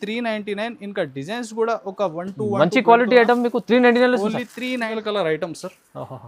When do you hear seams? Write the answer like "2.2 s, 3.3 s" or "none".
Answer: 4.9 s